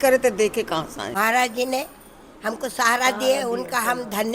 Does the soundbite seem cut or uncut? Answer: cut